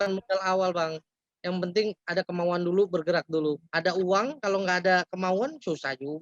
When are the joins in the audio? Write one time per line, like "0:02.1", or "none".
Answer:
none